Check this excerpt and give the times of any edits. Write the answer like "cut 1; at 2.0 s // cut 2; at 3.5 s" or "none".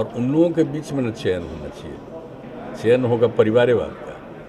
cut 1; at 2.4 s